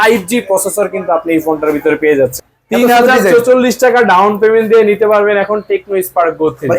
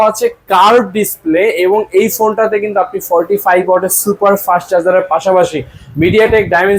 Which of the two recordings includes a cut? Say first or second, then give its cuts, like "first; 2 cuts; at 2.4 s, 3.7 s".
first; 1 cut; at 2.4 s